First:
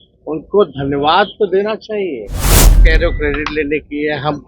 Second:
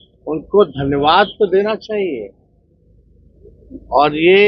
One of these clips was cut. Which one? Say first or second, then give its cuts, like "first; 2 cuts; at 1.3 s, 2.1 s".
first; 1 cut; at 2.7 s